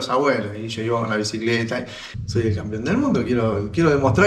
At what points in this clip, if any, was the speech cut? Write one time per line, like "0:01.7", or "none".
0:02.0